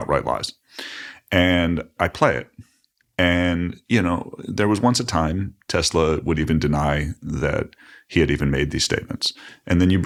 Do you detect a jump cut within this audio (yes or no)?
no